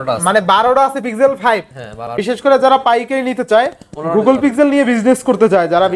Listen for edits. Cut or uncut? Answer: cut